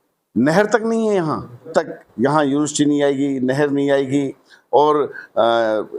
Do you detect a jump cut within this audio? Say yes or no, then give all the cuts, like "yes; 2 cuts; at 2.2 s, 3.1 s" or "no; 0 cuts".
yes; 1 cut; at 1.7 s